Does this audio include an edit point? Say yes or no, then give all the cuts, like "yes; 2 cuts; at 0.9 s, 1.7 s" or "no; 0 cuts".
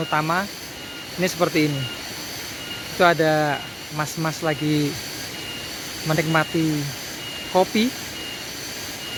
no; 0 cuts